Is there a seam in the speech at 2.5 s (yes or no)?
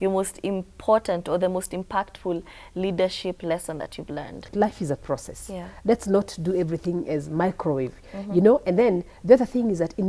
no